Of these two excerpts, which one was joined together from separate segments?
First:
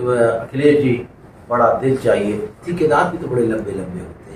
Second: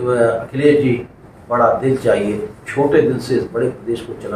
first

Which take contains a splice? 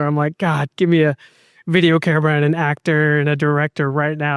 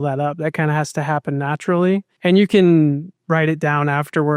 second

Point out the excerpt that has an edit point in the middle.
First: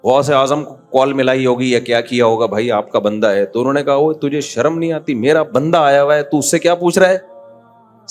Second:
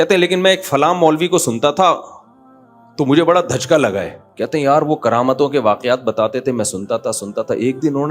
second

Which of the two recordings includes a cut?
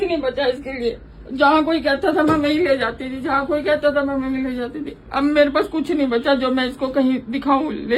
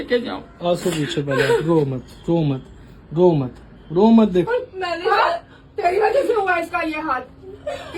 second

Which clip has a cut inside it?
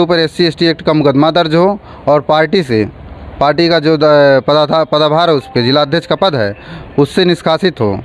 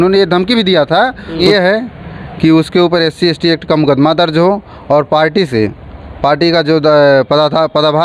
second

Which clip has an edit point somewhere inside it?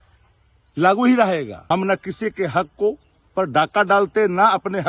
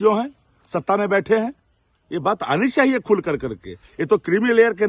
first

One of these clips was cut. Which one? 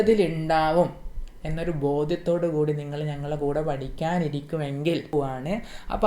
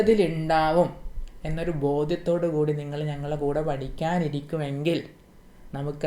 first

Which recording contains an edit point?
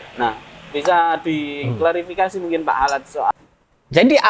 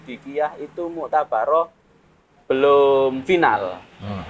first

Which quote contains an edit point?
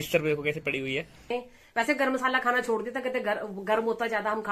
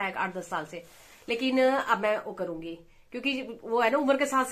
first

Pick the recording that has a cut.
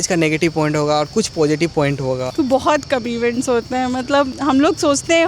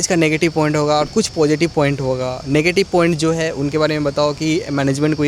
first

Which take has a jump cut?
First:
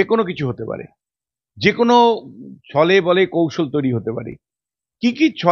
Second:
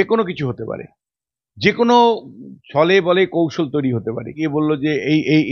second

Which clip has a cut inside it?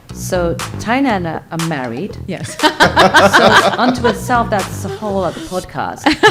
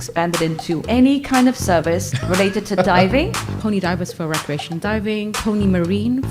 second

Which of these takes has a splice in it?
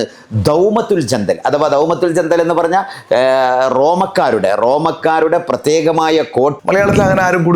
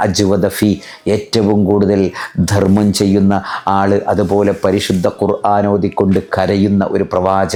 first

